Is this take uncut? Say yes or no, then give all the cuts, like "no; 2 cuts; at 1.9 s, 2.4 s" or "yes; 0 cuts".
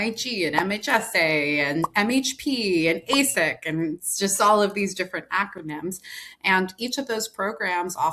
yes; 0 cuts